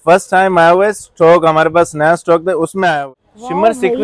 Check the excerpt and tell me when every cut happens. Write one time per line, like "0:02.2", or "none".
0:03.0